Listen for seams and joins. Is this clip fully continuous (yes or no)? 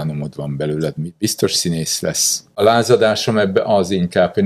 no